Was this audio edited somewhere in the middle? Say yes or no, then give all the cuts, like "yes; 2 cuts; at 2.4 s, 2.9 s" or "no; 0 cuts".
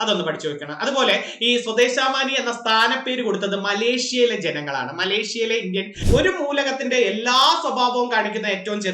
yes; 1 cut; at 6.0 s